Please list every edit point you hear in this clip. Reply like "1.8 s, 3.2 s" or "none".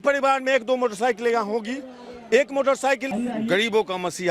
3.1 s

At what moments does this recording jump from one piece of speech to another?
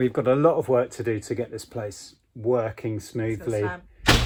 none

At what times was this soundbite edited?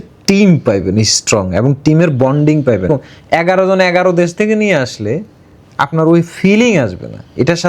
2.9 s

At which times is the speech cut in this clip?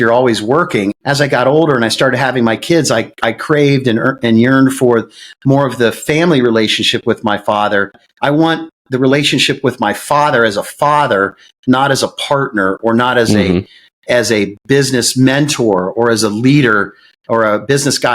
0.9 s, 8.0 s

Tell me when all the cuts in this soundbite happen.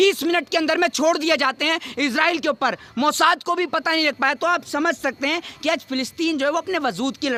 none

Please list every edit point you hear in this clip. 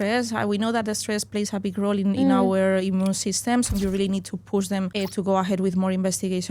3.7 s, 4.9 s

